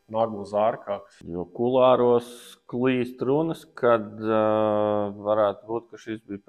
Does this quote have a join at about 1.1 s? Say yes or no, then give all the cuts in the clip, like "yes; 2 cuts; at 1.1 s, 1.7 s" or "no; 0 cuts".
yes; 1 cut; at 1.1 s